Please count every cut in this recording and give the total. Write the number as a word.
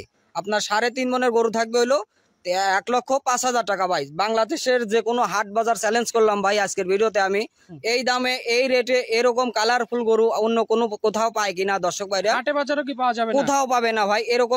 zero